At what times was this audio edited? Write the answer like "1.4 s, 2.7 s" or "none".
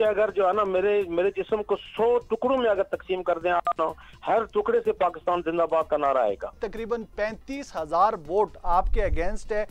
6.7 s